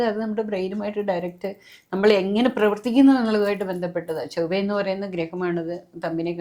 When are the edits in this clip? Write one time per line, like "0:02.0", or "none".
none